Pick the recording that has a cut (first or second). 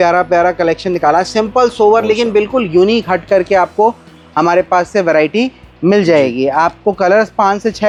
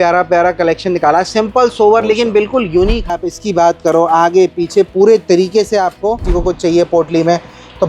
second